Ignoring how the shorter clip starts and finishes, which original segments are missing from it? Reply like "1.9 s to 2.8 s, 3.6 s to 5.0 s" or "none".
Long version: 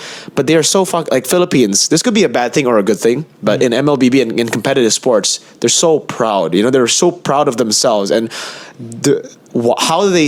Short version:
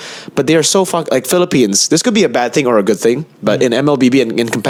none